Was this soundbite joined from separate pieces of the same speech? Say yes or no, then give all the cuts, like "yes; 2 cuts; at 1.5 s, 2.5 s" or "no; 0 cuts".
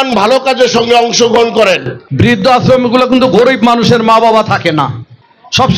yes; 1 cut; at 2.1 s